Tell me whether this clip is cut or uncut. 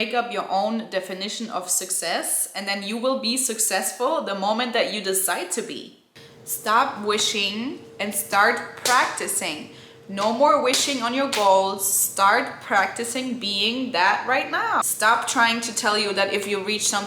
cut